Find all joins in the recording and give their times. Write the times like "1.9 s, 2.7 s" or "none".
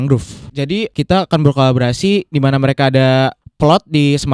0.7 s, 3.4 s